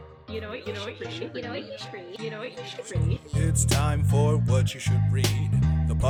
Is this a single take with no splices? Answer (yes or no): yes